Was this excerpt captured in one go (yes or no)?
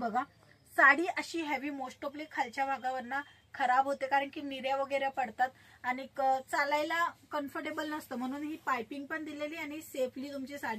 yes